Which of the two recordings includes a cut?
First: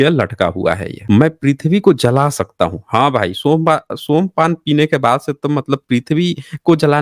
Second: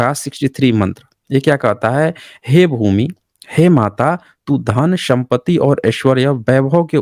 first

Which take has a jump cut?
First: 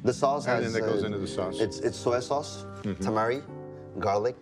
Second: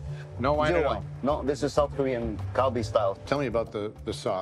second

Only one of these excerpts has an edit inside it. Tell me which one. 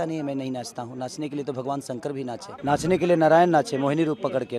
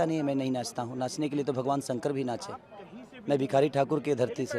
first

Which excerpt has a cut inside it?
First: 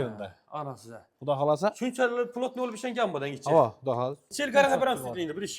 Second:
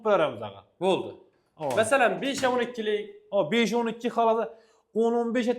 first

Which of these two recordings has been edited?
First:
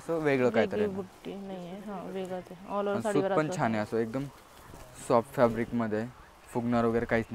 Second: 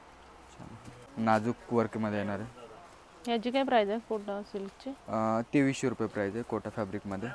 second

